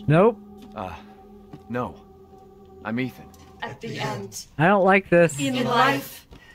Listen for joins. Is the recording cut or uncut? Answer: cut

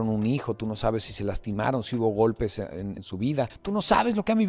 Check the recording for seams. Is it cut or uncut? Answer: cut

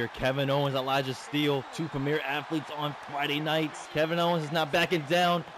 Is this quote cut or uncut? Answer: cut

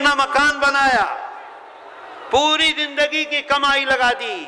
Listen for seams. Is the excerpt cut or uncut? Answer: uncut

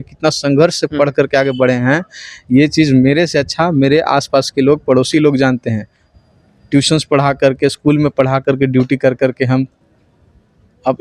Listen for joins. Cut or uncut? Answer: uncut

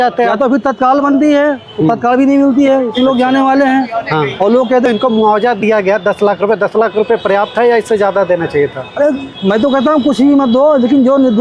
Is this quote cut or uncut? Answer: cut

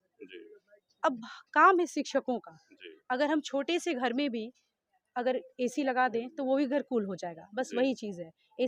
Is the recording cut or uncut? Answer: uncut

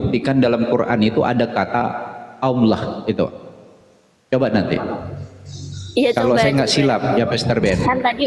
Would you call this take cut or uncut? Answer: uncut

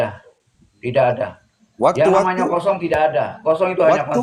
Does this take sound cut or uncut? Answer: uncut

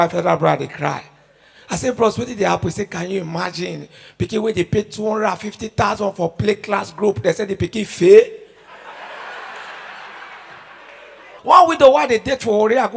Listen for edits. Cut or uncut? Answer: cut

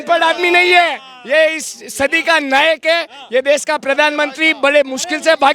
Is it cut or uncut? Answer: uncut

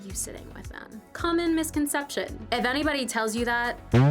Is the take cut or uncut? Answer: cut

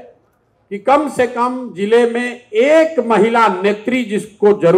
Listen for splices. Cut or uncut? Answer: uncut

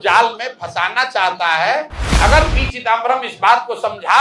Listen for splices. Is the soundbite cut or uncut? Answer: cut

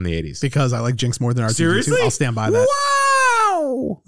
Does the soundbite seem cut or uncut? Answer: uncut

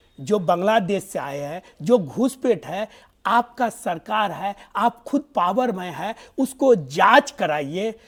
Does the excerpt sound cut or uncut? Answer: uncut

